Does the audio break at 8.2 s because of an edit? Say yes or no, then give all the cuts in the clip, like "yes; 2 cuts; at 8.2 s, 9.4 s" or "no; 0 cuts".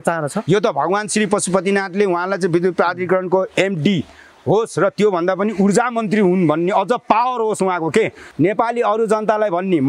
yes; 1 cut; at 8.2 s